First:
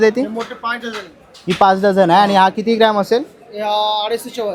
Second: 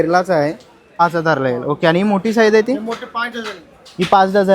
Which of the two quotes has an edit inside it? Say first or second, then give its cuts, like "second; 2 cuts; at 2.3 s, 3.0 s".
second; 1 cut; at 1.0 s